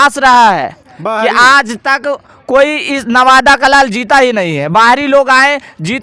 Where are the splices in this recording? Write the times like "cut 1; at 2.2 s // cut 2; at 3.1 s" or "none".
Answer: none